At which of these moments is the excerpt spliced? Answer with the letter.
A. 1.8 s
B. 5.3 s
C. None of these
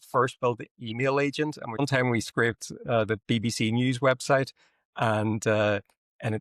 A